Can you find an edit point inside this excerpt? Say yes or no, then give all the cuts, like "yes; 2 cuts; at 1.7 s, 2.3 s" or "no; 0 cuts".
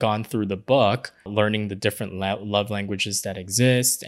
yes; 1 cut; at 1.3 s